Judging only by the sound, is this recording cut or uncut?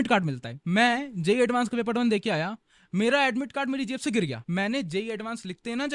cut